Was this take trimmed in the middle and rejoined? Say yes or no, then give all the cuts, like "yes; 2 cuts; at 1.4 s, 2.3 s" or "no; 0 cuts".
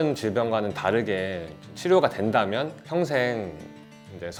no; 0 cuts